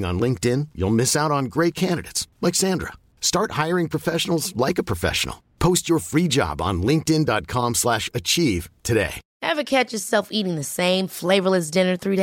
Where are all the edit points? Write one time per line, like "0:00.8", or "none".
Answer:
0:09.2